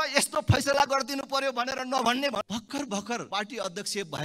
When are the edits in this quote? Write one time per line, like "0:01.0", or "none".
0:02.4
0:03.3